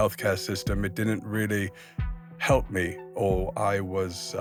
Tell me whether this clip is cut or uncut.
uncut